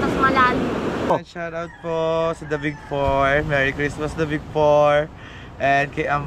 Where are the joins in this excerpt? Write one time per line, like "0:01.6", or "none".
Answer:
0:01.1